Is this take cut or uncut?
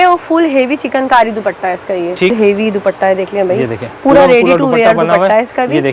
cut